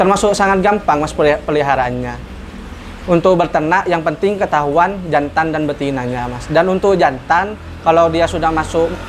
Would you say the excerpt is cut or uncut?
uncut